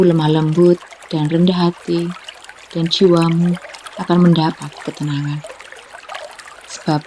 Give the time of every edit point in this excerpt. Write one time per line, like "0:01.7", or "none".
none